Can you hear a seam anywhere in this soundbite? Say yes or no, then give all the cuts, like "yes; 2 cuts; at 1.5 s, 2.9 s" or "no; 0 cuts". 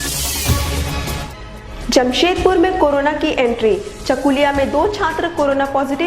yes; 1 cut; at 1.2 s